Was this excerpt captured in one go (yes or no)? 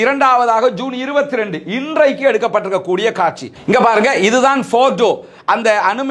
yes